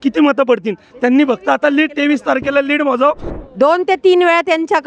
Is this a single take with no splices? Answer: no; 1 cut; at 3.3 s

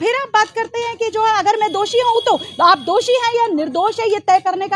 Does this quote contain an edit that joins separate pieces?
no; 0 cuts

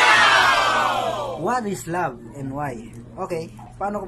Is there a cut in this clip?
no; 0 cuts

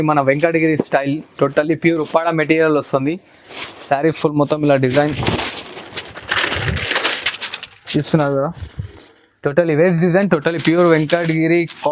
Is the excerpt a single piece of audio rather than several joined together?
yes; 0 cuts

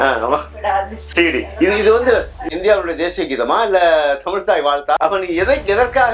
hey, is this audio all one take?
yes; 0 cuts

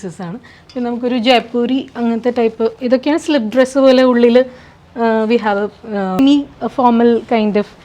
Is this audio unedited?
no; 1 cut; at 6.2 s

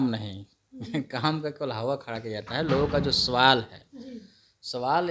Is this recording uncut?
yes; 0 cuts

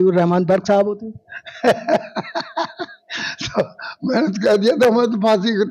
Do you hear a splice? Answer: no; 0 cuts

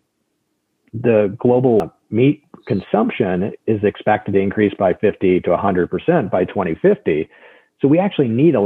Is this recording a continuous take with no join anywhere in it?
no; 1 cut; at 1.8 s

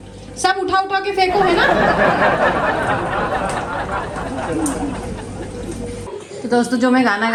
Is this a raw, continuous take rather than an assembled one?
yes; 0 cuts

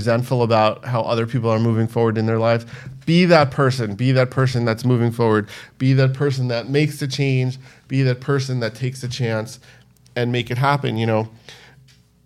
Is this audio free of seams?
yes; 0 cuts

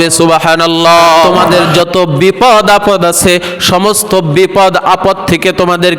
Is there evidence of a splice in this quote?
yes; 1 cut; at 1.3 s

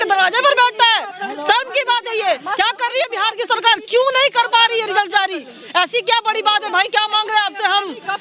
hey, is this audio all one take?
yes; 0 cuts

